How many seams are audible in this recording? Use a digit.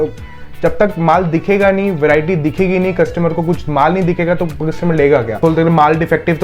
1